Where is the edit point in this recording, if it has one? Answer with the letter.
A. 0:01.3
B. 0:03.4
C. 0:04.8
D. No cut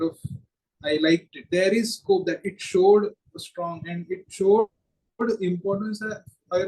A